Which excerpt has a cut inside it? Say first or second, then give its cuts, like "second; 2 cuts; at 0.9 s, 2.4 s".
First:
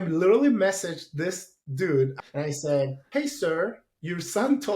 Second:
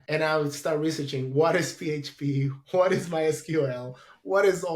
first; 1 cut; at 2.1 s